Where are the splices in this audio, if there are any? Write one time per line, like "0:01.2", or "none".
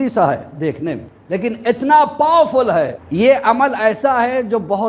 0:01.1
0:03.0